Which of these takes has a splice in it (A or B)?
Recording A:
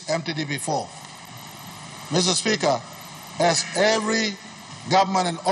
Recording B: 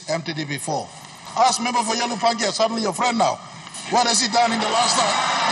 B